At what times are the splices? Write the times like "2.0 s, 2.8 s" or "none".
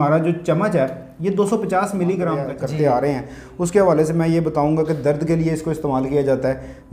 2.5 s